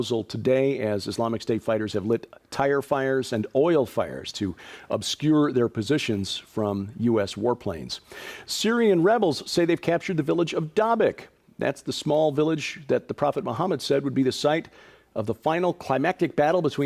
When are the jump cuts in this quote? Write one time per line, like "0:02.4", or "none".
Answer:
0:09.7

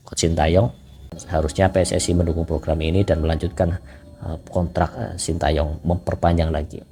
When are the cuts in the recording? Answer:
0:01.2

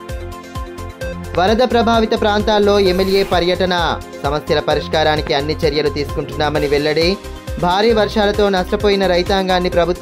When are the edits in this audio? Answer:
0:01.1

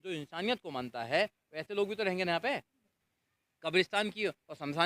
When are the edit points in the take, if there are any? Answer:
0:03.0

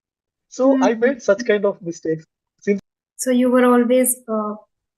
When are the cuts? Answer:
0:02.8

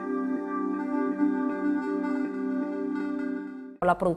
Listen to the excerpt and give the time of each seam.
0:03.1

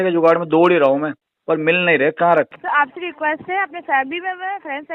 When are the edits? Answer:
0:02.6

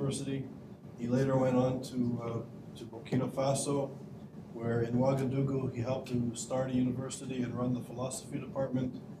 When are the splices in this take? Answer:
none

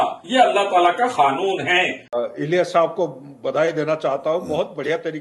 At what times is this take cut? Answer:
0:02.0

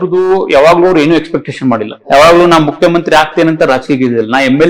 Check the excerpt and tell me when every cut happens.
0:02.0

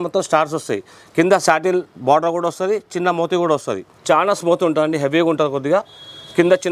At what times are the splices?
0:03.9

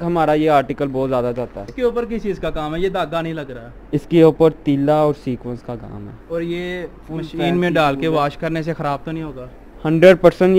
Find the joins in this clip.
0:01.7

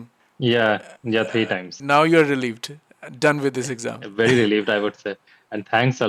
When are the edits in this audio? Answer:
0:01.8

